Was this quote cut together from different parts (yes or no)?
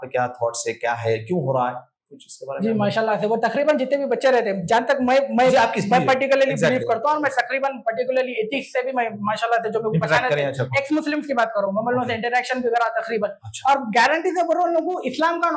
no